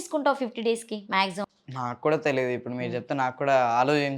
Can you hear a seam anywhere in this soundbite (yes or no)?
yes